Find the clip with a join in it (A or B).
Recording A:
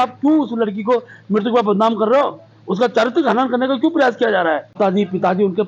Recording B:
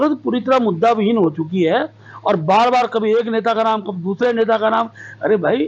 A